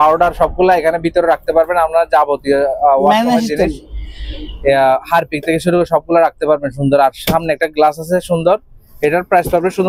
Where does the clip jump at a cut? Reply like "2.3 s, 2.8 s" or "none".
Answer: none